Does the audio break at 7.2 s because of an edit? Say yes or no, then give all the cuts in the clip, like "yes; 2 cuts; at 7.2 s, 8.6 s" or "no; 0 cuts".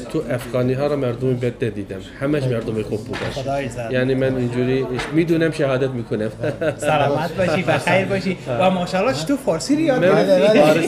no; 0 cuts